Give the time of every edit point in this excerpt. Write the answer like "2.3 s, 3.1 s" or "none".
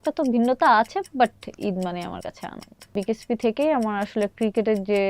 2.9 s